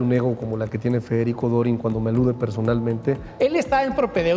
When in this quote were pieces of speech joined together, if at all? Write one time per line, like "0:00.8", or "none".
0:03.3